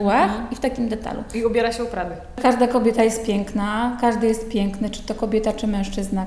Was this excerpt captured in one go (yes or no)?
no